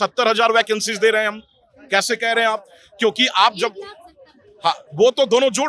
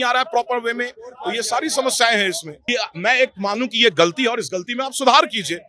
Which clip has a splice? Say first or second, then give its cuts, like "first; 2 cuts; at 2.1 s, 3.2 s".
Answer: second; 1 cut; at 2.7 s